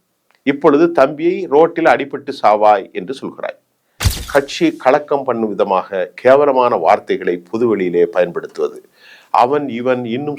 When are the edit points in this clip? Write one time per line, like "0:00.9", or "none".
0:04.1